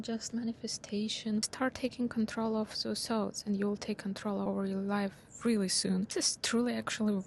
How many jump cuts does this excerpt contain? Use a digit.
3